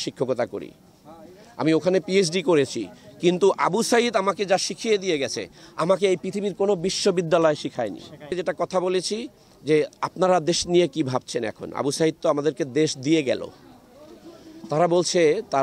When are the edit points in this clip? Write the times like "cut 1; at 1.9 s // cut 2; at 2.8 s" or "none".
cut 1; at 8.3 s

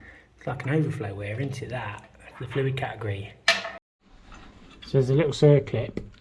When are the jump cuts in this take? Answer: cut 1; at 3.8 s

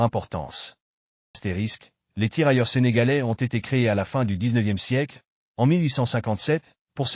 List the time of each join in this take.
cut 1; at 1.4 s

